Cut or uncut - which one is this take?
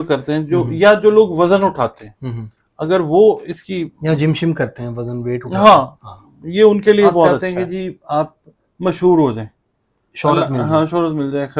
cut